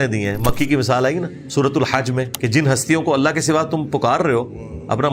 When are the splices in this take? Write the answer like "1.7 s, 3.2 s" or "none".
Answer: 1.4 s, 2.3 s